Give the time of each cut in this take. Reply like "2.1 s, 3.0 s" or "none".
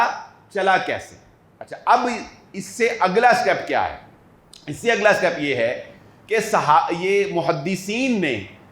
none